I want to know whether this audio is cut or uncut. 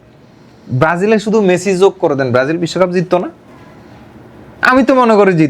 uncut